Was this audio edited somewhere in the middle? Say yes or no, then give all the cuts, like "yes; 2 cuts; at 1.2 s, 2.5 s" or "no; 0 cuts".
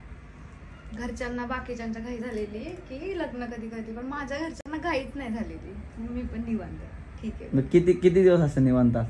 no; 0 cuts